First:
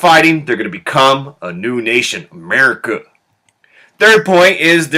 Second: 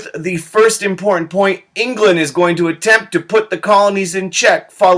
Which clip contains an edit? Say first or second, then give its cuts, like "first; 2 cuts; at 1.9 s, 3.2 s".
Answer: second; 1 cut; at 1.2 s